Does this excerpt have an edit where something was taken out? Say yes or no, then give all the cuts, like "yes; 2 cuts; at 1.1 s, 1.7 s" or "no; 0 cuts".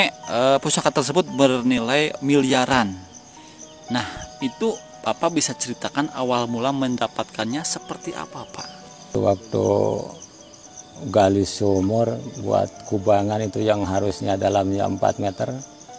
yes; 1 cut; at 9.1 s